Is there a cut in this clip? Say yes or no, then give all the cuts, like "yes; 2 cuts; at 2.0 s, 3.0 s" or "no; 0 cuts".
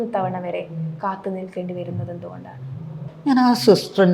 yes; 1 cut; at 0.9 s